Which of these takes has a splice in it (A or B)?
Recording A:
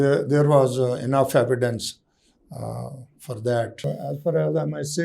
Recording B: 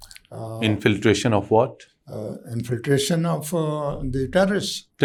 A